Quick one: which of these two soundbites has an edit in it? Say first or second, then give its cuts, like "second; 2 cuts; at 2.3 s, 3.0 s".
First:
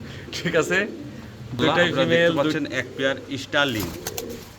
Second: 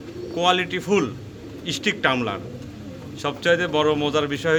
first; 1 cut; at 2.4 s